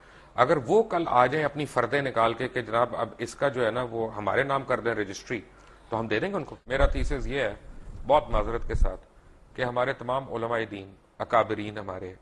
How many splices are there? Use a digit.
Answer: 1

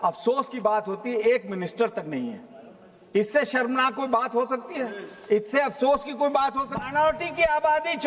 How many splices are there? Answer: 1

